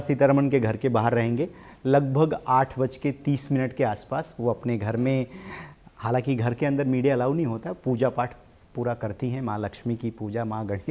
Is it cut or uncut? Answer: uncut